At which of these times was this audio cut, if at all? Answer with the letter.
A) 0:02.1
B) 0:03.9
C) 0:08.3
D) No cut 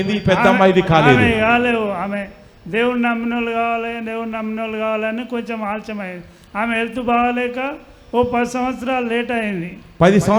D